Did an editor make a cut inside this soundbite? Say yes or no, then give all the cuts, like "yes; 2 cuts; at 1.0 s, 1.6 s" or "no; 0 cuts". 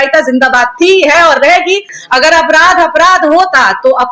yes; 1 cut; at 1.9 s